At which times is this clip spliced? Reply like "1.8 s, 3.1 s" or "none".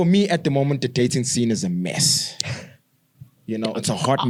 none